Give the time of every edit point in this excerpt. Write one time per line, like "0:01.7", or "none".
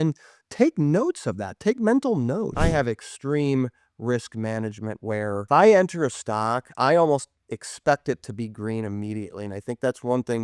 0:02.6
0:05.4